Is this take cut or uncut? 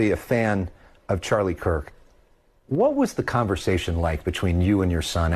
uncut